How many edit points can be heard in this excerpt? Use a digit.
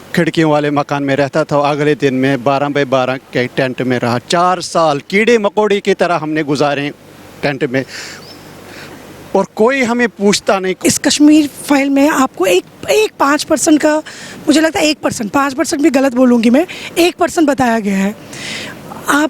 1